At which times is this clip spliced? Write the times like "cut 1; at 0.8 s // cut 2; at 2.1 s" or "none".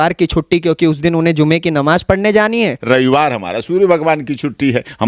cut 1; at 2.8 s